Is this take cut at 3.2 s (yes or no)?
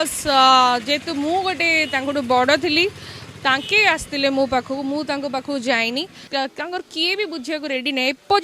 no